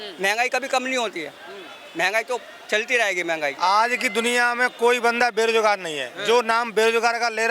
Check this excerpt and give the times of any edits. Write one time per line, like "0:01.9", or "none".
0:03.5